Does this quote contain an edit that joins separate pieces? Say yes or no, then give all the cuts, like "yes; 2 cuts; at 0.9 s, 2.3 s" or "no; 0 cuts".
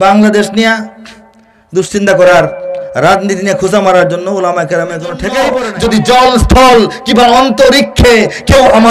yes; 1 cut; at 5.6 s